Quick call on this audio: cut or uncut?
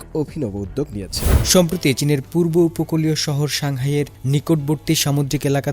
cut